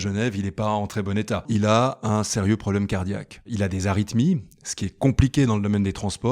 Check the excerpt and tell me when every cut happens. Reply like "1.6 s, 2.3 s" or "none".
1.5 s, 3.5 s